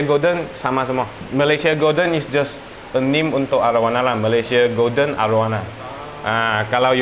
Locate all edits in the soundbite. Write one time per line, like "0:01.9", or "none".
0:01.2